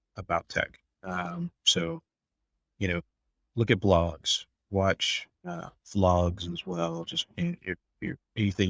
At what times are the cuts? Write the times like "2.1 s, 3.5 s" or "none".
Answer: none